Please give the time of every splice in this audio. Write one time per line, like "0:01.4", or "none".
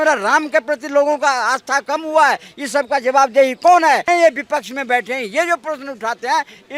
0:04.0